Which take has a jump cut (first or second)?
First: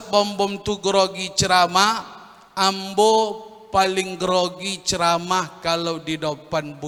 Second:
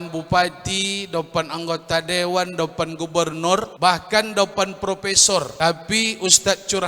second